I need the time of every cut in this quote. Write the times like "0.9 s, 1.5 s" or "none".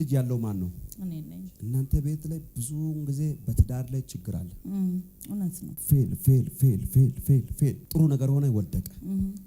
1.5 s, 5.7 s, 7.8 s